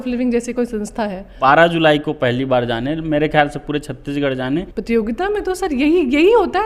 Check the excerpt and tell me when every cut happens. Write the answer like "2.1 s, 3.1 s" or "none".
1.4 s, 4.5 s